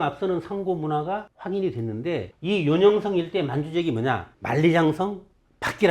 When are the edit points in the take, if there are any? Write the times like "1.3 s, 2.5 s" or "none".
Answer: 1.3 s, 2.3 s, 4.3 s